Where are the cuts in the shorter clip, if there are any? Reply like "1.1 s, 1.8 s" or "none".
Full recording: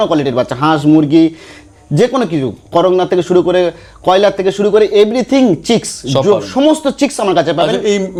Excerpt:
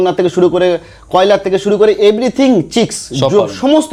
none